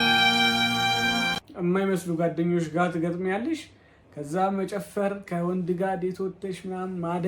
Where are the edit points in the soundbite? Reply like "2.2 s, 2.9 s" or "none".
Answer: 1.4 s